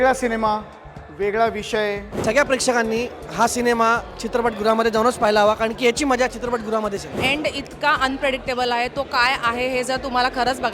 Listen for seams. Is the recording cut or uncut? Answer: cut